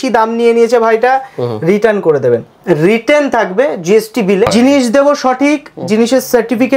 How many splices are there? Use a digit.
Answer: 2